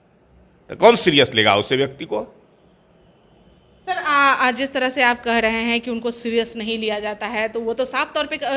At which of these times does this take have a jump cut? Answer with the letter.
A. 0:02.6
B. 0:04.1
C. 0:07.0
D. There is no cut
D